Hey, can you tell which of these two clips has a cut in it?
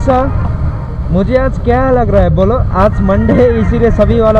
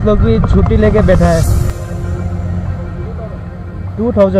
second; 1 cut; at 1.7 s

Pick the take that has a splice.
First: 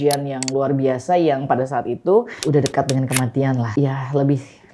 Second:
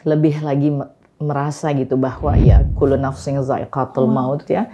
first; 2 cuts; at 2.4 s, 3.7 s

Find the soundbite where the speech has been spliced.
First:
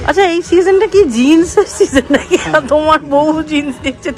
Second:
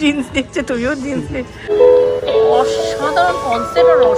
second; 1 cut; at 1.7 s

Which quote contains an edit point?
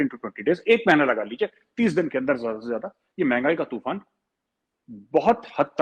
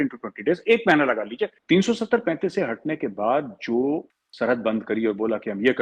second; 2 cuts; at 1.6 s, 4.2 s

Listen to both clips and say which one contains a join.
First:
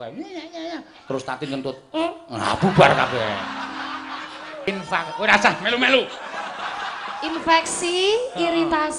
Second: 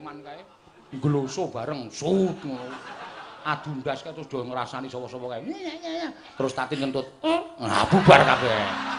first; 1 cut; at 4.7 s

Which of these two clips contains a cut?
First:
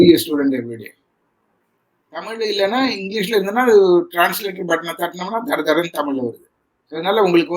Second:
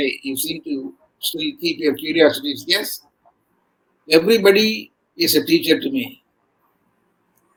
first; 1 cut; at 2.4 s

